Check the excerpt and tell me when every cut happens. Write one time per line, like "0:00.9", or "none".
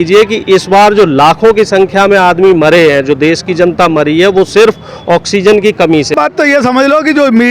0:06.1

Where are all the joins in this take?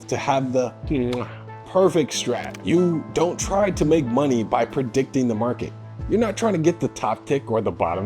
0:02.5

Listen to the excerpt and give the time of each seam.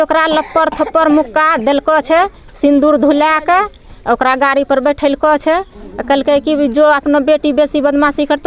none

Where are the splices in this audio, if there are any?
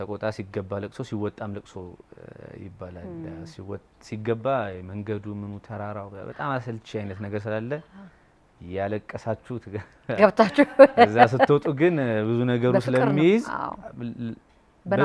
none

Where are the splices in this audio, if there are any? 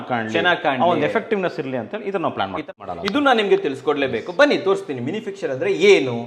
0:02.7

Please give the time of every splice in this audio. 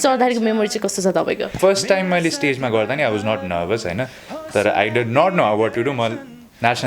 0:01.5

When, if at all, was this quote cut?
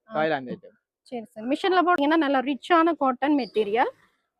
0:02.0

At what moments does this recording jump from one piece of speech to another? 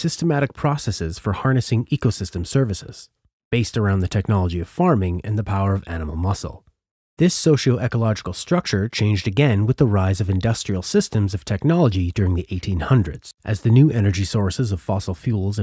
0:11.6

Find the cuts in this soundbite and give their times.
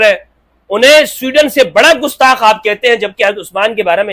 none

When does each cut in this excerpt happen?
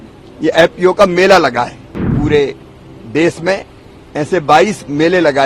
0:02.0

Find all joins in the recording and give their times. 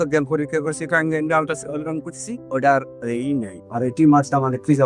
none

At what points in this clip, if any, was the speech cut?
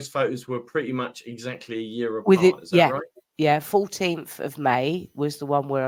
none

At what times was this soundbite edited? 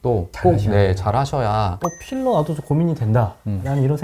0:01.8

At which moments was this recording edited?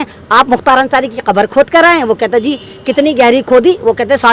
none

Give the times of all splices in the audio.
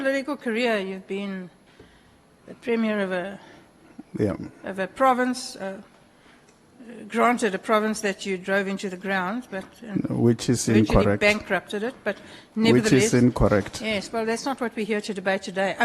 none

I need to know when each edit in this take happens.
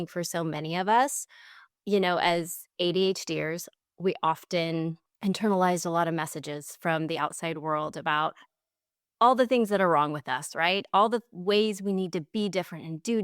0:05.1

